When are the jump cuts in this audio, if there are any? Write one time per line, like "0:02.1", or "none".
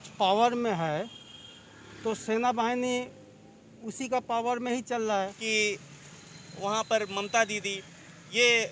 0:05.2